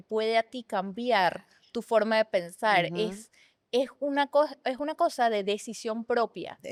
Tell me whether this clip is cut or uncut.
uncut